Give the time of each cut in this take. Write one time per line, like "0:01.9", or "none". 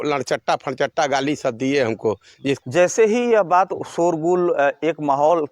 0:02.6